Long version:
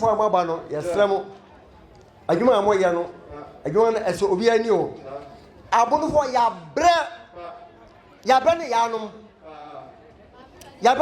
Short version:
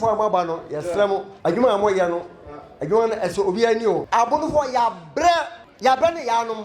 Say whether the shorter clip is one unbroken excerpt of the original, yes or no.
no